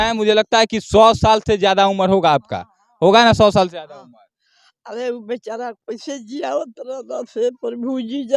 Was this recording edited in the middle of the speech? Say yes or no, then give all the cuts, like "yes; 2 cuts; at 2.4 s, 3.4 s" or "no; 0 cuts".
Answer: no; 0 cuts